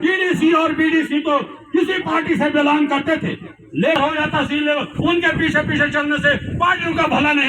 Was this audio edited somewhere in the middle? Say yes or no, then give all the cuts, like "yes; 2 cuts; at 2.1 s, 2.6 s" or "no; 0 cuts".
yes; 1 cut; at 4.0 s